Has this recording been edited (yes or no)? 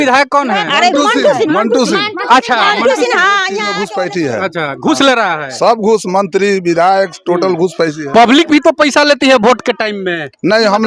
yes